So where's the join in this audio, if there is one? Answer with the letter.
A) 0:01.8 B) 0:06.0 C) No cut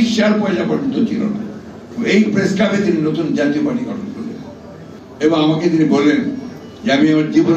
A